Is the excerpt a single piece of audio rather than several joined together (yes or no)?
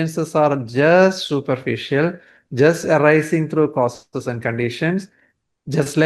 yes